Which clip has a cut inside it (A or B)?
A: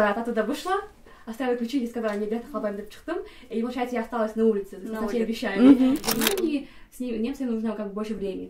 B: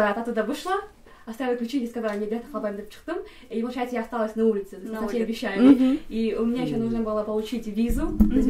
A